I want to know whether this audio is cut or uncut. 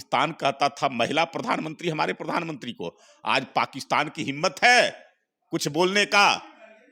uncut